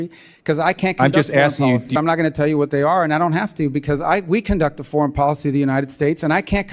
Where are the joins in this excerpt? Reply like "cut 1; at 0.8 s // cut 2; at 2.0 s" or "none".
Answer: cut 1; at 2.0 s